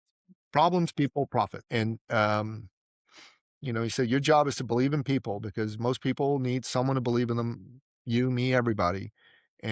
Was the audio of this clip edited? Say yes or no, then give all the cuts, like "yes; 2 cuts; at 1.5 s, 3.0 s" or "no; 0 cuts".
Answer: yes; 1 cut; at 1.6 s